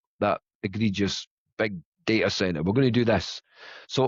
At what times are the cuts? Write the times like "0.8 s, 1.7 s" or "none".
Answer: none